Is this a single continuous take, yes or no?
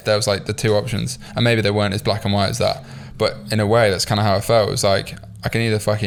yes